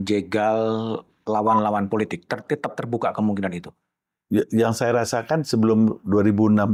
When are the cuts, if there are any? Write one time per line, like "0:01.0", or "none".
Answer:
none